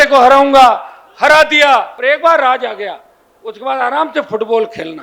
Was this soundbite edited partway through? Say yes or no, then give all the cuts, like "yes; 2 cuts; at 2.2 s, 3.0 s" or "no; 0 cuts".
yes; 1 cut; at 1.9 s